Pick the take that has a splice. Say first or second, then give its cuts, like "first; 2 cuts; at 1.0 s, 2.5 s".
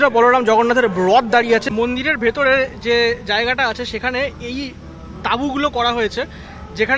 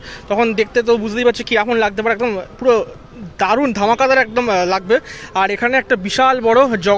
first; 1 cut; at 1.7 s